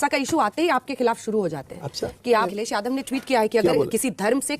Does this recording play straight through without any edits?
no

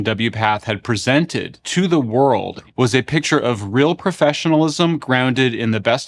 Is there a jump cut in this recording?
yes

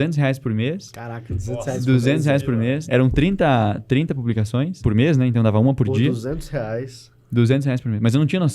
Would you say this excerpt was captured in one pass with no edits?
no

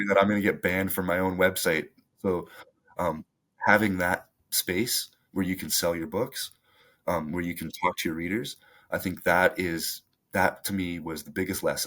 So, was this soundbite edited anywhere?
no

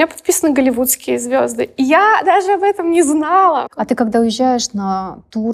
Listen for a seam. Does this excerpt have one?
yes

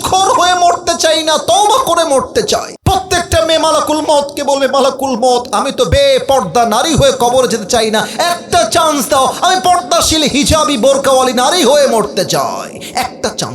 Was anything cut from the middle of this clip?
yes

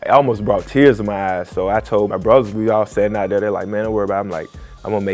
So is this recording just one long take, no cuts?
no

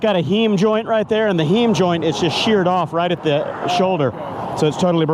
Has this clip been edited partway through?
no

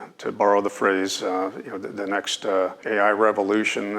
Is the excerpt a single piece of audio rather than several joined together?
no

